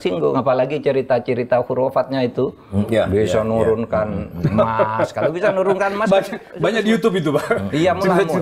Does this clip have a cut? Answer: no; 0 cuts

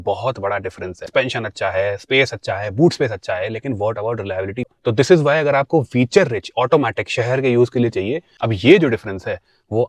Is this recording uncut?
no; 3 cuts; at 1.1 s, 4.7 s, 8.3 s

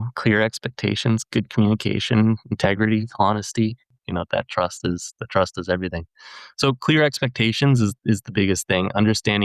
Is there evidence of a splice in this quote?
yes; 1 cut; at 3.8 s

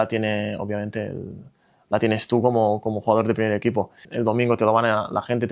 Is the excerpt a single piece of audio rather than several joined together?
no; 1 cut; at 4.0 s

